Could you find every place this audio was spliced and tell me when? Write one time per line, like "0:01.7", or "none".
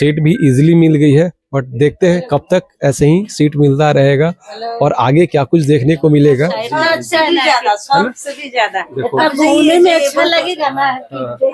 0:06.6